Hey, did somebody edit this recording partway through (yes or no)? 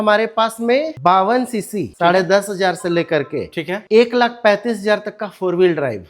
no